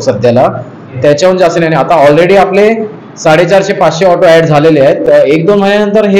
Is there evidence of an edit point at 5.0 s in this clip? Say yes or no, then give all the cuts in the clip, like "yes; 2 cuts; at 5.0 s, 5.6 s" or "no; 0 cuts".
yes; 1 cut; at 5.0 s